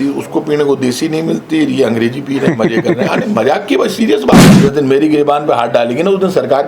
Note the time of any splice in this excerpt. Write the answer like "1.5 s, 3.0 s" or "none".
4.5 s